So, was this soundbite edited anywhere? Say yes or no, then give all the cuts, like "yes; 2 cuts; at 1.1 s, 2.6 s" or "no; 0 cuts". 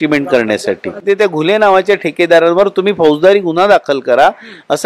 yes; 1 cut; at 1.0 s